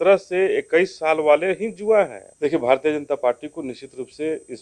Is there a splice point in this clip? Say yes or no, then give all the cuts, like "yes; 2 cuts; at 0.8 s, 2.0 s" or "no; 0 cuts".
yes; 1 cut; at 2.2 s